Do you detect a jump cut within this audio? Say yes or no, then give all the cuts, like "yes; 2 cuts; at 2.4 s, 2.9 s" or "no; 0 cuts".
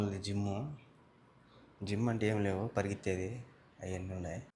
no; 0 cuts